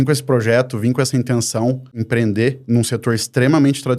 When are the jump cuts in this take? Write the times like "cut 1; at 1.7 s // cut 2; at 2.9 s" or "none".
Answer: cut 1; at 2.0 s